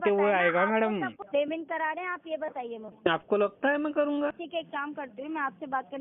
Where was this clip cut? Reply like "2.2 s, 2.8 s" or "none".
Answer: 1.2 s, 2.9 s, 4.4 s